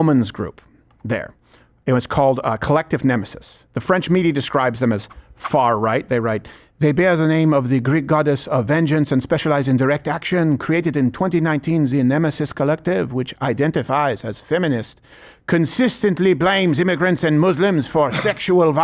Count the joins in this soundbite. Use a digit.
0